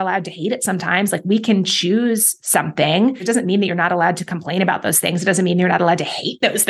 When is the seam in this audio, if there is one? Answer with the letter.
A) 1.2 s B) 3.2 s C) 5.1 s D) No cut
B